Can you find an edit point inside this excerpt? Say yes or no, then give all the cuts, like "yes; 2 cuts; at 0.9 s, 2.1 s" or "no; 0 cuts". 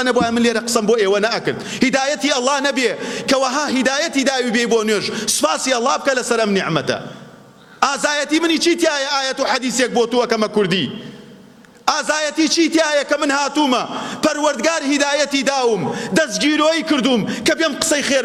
no; 0 cuts